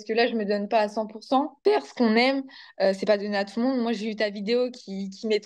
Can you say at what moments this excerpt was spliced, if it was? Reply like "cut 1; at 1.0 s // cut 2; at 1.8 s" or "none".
cut 1; at 1.5 s